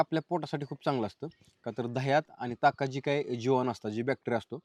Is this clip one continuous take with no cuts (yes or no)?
yes